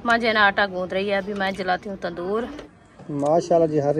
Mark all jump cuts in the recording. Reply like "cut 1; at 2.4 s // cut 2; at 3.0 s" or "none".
cut 1; at 2.7 s

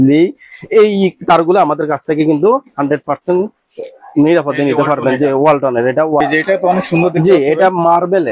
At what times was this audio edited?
cut 1; at 6.2 s

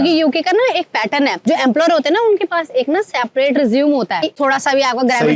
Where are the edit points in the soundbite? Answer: cut 1; at 4.4 s

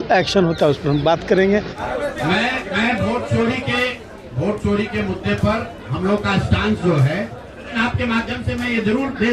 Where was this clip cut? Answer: cut 1; at 1.8 s // cut 2; at 7.7 s

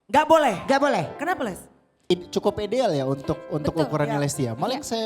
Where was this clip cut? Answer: cut 1; at 1.9 s

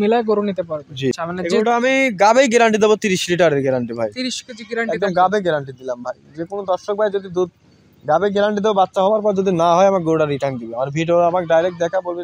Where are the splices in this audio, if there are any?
cut 1; at 1.1 s

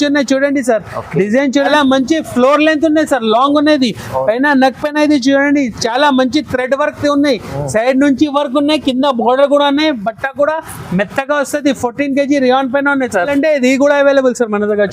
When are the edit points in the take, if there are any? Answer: cut 1; at 1.7 s // cut 2; at 13.3 s

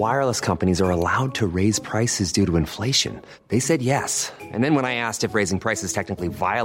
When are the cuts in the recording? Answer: none

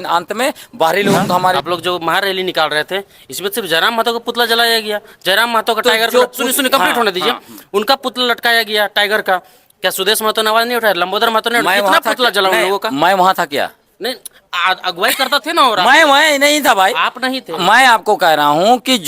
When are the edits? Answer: cut 1; at 1.6 s

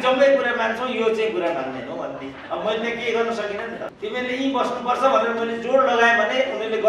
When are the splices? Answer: cut 1; at 3.9 s

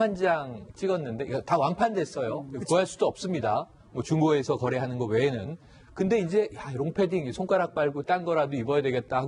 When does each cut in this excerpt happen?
none

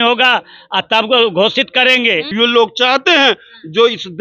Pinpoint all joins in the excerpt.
cut 1; at 2.3 s

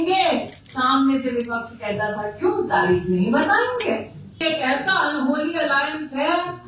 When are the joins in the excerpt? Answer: cut 1; at 4.3 s

